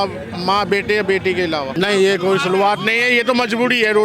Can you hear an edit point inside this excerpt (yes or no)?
yes